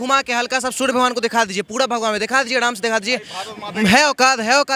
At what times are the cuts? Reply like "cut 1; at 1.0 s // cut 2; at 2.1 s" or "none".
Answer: none